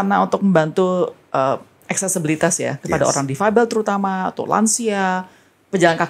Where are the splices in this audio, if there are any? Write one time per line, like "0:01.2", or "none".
none